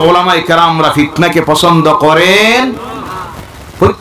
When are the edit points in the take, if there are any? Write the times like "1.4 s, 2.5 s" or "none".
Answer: none